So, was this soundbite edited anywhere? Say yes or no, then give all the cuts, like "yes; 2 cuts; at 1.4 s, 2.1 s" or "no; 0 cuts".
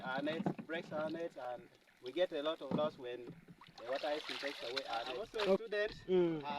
yes; 1 cut; at 5.6 s